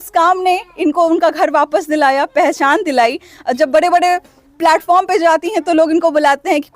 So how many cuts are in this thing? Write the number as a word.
zero